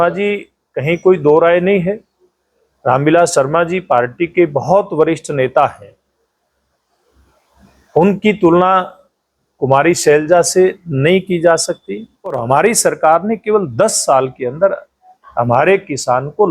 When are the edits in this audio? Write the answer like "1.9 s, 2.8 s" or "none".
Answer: 12.4 s